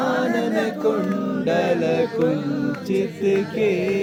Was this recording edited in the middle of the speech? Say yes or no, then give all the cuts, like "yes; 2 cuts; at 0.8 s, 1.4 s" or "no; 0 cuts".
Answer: no; 0 cuts